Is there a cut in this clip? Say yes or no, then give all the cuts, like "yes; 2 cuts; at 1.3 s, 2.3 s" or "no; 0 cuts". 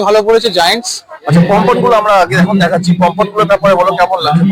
no; 0 cuts